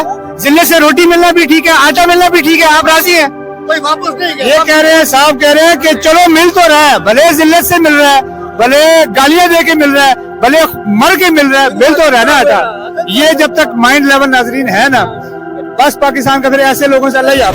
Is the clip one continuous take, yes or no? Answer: yes